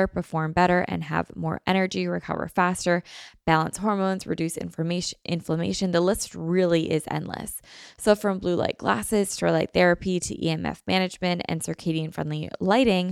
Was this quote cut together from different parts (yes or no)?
no